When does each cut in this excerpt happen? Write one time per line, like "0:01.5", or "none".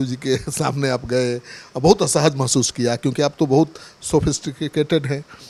none